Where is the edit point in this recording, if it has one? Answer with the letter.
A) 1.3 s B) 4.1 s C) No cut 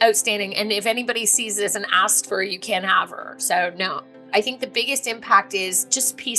B